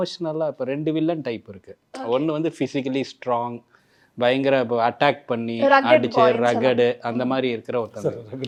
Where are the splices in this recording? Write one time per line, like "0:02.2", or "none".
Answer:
none